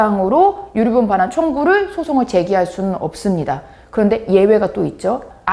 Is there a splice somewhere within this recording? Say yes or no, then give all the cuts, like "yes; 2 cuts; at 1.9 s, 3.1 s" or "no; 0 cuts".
no; 0 cuts